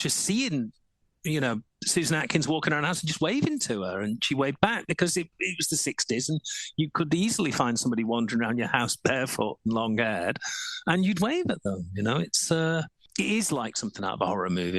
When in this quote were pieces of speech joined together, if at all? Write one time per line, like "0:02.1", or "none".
0:13.0